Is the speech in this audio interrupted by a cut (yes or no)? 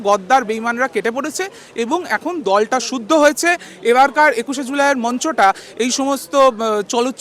no